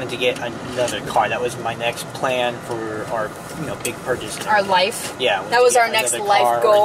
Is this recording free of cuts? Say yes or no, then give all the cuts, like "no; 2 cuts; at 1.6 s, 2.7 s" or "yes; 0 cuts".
yes; 0 cuts